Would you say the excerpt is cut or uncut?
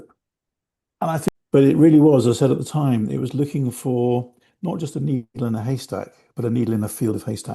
cut